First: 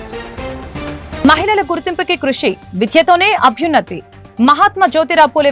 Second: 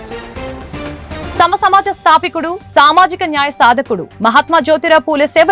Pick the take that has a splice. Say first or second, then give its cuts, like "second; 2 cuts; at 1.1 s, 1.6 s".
first; 1 cut; at 1.2 s